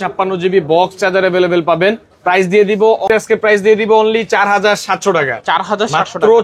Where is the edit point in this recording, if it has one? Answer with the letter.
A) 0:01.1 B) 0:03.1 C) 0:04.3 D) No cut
B